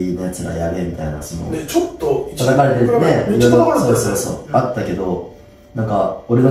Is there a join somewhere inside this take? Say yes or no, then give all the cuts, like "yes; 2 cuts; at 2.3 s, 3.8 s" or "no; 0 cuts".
no; 0 cuts